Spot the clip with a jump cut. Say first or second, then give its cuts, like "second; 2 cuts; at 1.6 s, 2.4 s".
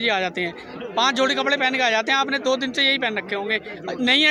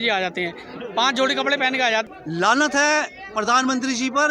second; 1 cut; at 2.1 s